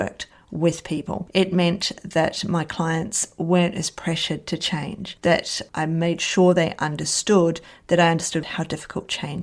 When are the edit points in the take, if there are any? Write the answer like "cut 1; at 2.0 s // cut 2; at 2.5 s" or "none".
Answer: cut 1; at 8.4 s